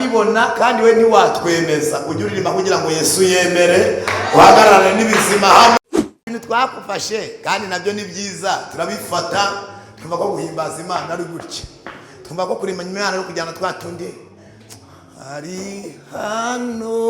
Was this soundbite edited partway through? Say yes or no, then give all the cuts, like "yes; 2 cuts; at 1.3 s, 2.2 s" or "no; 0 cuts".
yes; 1 cut; at 5.8 s